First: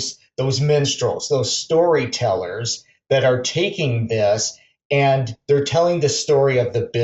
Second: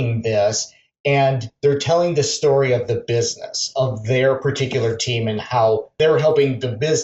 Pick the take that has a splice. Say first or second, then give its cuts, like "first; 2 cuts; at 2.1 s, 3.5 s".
second; 1 cut; at 5.9 s